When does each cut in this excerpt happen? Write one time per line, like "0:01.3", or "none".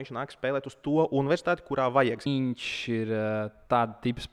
0:02.3